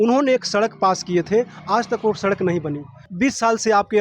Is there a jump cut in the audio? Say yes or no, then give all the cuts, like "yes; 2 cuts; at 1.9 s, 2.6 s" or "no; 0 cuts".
yes; 1 cut; at 3.1 s